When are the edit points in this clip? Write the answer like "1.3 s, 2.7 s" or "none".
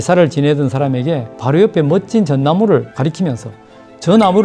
1.3 s, 2.9 s